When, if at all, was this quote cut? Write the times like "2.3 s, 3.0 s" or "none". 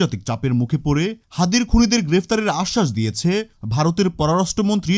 none